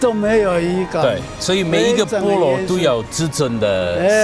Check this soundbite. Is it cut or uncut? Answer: cut